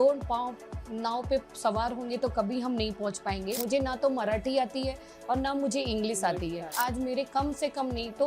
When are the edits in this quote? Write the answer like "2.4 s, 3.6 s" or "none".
3.6 s, 6.7 s